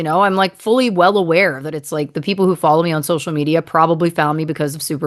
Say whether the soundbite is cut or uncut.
uncut